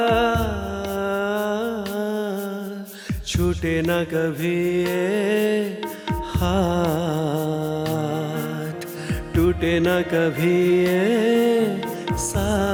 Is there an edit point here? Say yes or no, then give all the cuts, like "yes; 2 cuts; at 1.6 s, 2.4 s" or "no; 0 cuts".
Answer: no; 0 cuts